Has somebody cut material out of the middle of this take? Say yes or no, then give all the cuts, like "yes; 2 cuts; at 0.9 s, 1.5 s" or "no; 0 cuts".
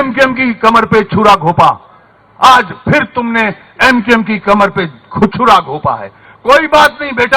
no; 0 cuts